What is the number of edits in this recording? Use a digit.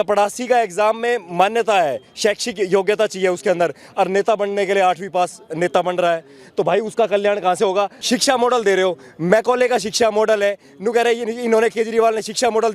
1